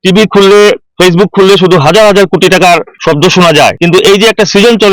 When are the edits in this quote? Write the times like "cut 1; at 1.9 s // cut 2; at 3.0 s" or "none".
cut 1; at 0.9 s // cut 2; at 2.9 s // cut 3; at 3.8 s